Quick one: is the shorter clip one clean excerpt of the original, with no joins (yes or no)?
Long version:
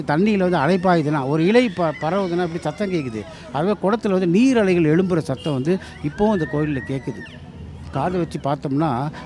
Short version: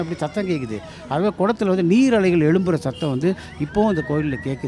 yes